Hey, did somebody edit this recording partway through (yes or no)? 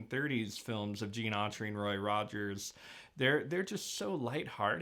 no